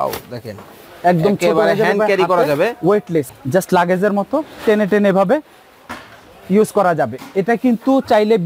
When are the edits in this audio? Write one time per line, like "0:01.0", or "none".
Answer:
0:03.3